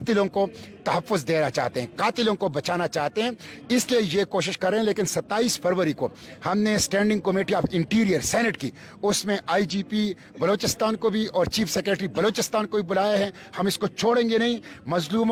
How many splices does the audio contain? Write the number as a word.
zero